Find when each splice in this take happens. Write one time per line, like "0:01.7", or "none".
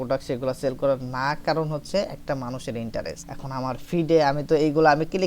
0:03.3